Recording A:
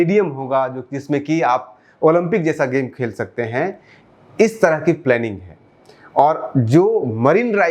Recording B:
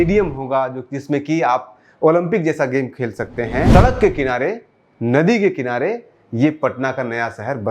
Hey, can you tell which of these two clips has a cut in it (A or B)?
B